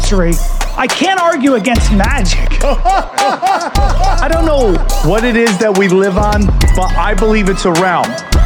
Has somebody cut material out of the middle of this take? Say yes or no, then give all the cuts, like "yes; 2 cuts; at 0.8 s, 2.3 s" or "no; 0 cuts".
no; 0 cuts